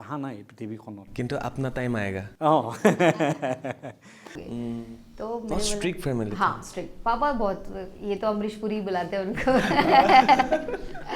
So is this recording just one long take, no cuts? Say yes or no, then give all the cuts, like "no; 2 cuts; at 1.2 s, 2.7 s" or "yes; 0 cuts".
no; 1 cut; at 4.4 s